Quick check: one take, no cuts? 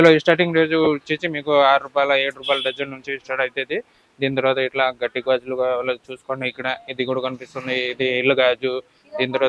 yes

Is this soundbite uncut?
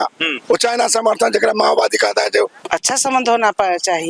no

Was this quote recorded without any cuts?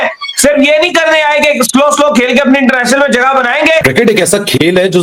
no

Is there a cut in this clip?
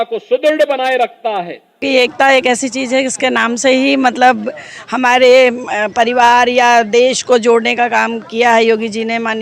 yes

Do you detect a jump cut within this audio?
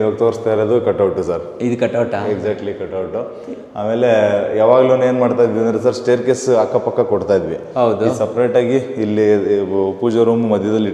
no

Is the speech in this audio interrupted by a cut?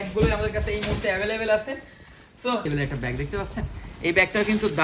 yes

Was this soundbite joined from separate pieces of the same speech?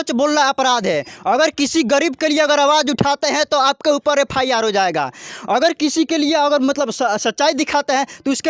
no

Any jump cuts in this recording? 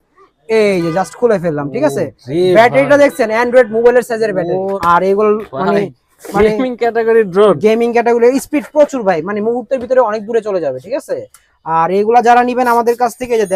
yes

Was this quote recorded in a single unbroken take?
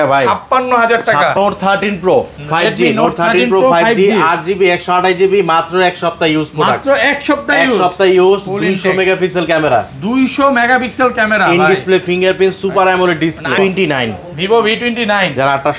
no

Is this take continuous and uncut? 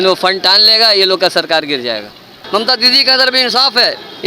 no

